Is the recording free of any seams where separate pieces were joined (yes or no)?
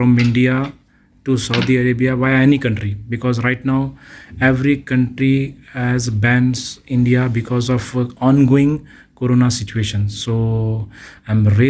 yes